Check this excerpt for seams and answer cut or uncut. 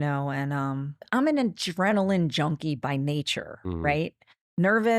cut